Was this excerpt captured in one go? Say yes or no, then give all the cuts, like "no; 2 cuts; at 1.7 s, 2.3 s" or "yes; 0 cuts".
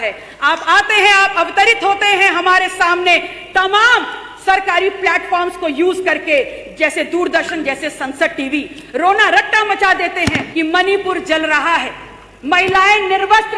no; 1 cut; at 10.4 s